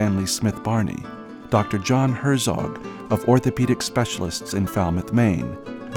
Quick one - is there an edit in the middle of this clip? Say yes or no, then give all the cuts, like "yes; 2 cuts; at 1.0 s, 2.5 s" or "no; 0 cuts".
no; 0 cuts